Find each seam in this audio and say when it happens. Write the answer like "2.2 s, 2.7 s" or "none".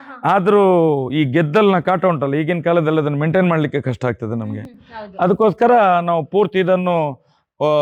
none